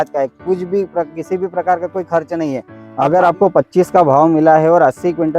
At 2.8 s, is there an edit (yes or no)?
yes